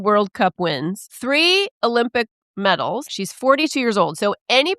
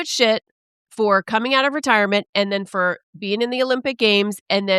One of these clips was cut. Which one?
first; 2 cuts; at 1.1 s, 3.2 s

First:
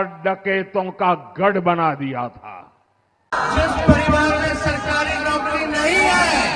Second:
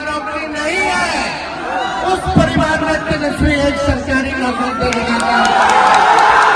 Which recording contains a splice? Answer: first; 1 cut; at 3.3 s

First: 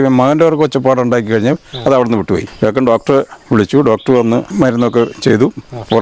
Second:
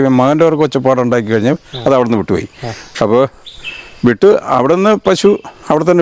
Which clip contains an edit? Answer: first; 2 cuts; at 2.5 s, 4.5 s

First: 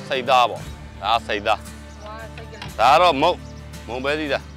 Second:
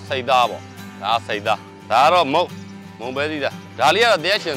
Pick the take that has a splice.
second; 2 cuts; at 1.7 s, 3.6 s

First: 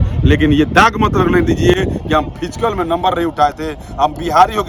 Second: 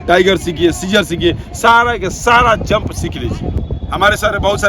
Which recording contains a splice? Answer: second; 1 cut; at 3.5 s

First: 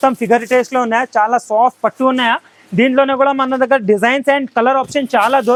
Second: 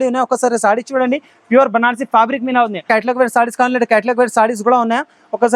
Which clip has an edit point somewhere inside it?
second; 1 cut; at 2.8 s

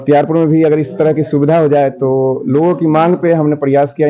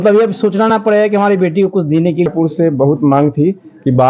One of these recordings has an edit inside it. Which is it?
second; 1 cut; at 2.3 s

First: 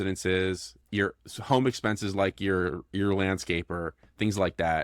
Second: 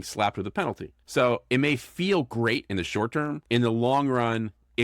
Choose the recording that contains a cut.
second; 2 cuts; at 0.9 s, 3.4 s

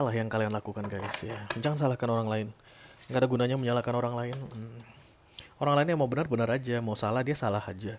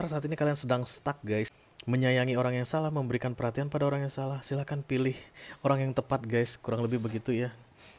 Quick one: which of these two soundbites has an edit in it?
second; 1 cut; at 1.5 s

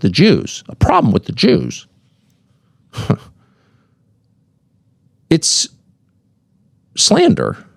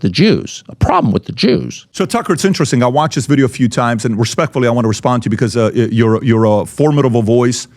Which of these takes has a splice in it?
second; 1 cut; at 1.8 s

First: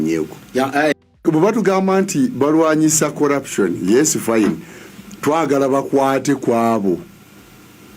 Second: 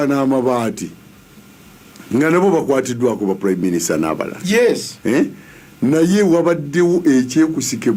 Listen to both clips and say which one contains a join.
first; 1 cut; at 0.9 s

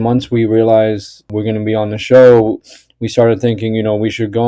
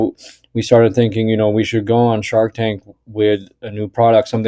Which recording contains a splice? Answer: first; 1 cut; at 1.2 s

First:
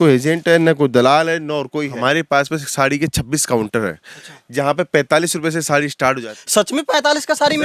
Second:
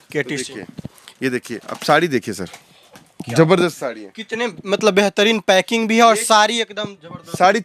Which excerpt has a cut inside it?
first; 2 cuts; at 1.9 s, 6.3 s

